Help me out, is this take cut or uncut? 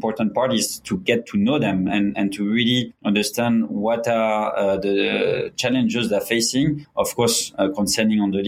cut